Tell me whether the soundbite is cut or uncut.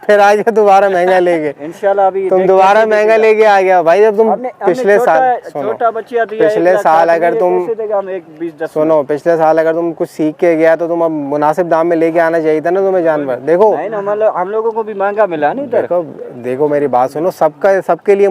uncut